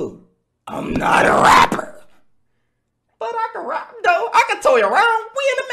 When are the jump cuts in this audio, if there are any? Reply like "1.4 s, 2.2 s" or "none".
none